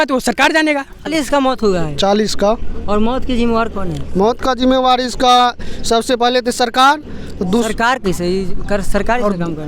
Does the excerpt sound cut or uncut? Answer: cut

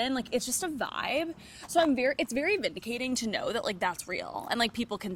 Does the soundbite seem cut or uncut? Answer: uncut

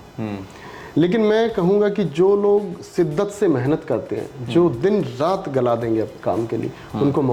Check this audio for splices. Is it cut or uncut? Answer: uncut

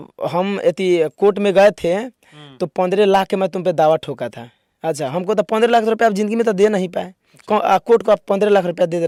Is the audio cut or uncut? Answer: uncut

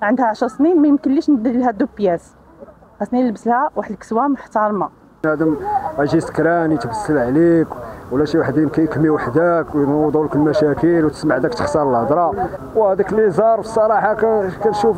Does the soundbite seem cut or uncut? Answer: cut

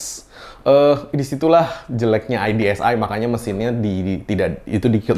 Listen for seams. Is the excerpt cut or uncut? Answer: uncut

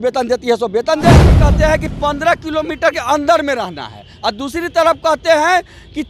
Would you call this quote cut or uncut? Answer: cut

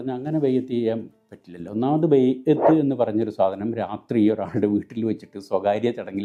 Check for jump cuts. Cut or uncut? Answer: uncut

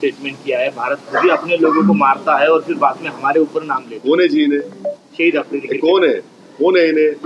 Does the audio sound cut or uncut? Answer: uncut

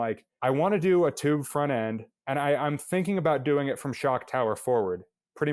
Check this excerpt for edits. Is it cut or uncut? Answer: uncut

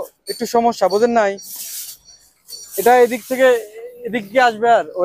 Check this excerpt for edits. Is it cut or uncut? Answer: uncut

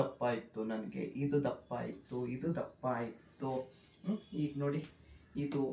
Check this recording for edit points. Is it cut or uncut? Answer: uncut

